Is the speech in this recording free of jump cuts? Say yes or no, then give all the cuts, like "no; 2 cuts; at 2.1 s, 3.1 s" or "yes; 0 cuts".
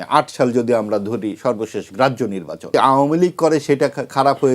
no; 1 cut; at 2.7 s